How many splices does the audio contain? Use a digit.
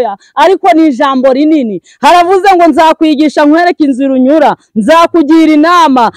0